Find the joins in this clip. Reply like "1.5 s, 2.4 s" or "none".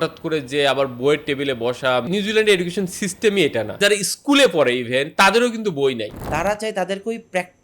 2.1 s, 3.7 s, 6.2 s